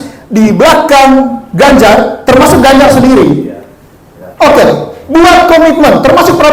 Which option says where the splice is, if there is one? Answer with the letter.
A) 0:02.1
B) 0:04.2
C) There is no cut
C